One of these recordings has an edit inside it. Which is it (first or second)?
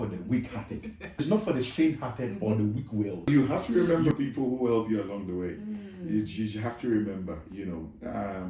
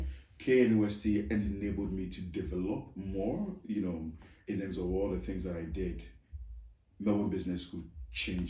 first